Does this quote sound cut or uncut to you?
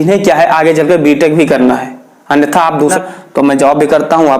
cut